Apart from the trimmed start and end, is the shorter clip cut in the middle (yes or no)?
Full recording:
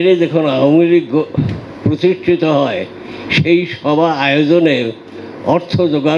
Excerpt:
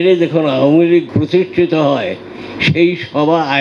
yes